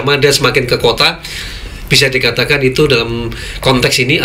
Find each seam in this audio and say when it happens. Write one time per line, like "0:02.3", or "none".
none